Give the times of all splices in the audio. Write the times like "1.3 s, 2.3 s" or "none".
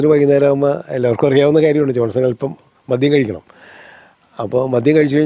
none